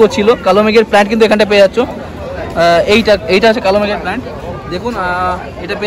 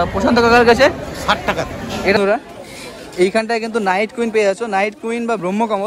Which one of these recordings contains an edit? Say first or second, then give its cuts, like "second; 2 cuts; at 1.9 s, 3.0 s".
second; 1 cut; at 2.1 s